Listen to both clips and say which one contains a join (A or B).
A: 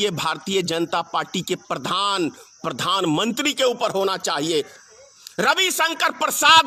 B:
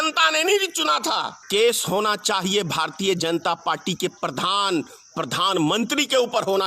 B